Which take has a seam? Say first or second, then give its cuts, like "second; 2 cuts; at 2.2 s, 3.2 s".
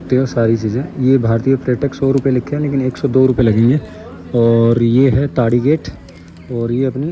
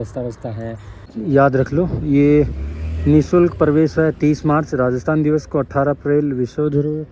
second; 1 cut; at 0.9 s